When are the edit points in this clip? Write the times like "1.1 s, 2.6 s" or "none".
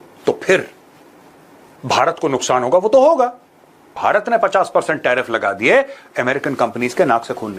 3.9 s

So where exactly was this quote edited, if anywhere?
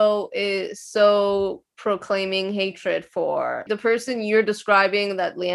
3.7 s

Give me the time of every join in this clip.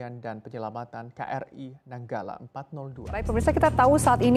3.2 s

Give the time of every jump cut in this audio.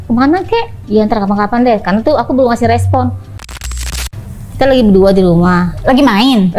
3.9 s

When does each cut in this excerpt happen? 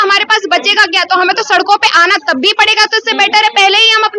none

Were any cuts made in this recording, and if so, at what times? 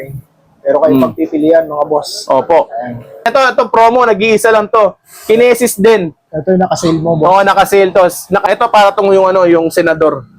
3.3 s, 8.4 s

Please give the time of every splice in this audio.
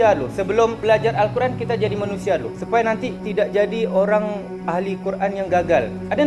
0.8 s, 3.2 s

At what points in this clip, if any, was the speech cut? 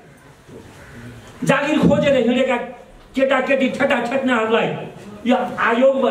none

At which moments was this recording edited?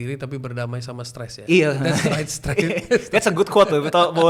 none

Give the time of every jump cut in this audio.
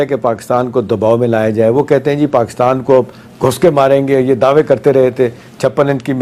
none

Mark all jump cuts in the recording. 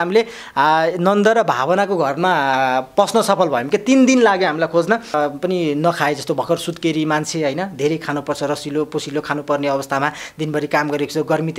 5.1 s

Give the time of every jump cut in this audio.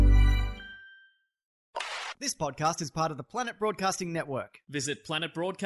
1.7 s

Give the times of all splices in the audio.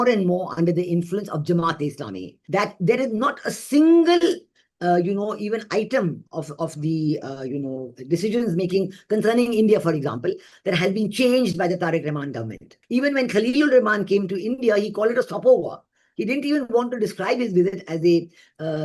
2.3 s, 12.7 s

